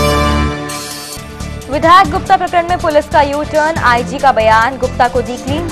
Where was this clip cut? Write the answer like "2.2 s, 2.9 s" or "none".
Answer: 1.1 s